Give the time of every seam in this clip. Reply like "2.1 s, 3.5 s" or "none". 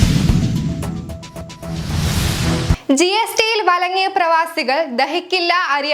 1.6 s